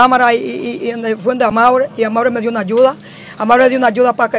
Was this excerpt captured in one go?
yes; 0 cuts

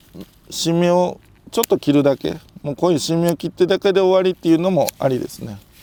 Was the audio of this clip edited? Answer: no; 0 cuts

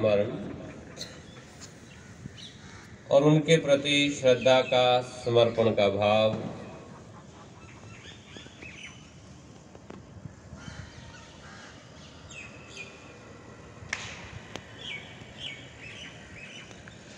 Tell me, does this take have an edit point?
no; 0 cuts

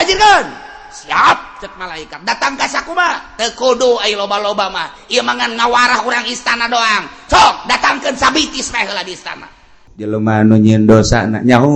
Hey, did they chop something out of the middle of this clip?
yes; 1 cut; at 9.9 s

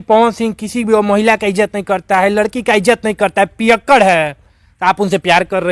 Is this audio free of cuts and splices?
yes; 0 cuts

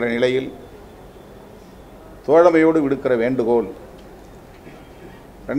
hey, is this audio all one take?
yes; 0 cuts

